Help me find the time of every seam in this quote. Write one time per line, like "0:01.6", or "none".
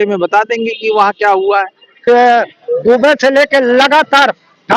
0:02.0

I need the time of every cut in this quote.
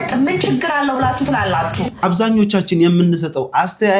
0:01.9

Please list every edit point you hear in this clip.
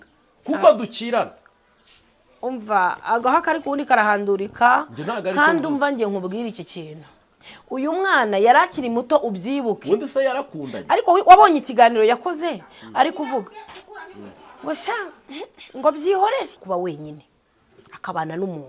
0:16.6

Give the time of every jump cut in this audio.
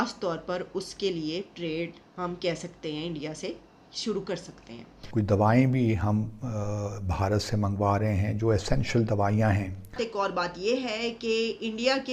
0:05.0
0:09.8

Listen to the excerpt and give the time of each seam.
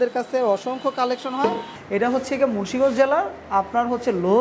0:01.8

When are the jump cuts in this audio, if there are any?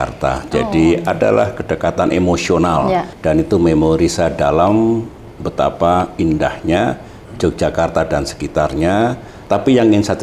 0:03.1
0:09.3

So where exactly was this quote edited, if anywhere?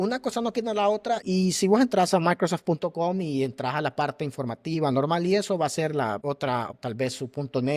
0:01.2
0:06.7

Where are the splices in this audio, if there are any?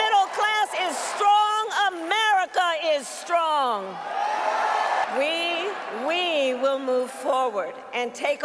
0:05.1

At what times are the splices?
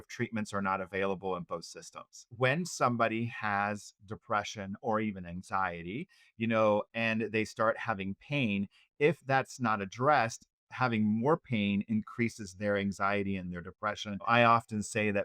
0:02.3
0:14.3

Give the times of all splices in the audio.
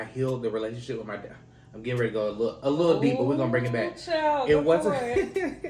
none

